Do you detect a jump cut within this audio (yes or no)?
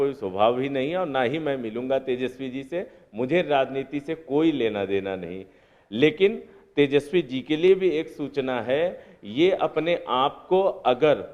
no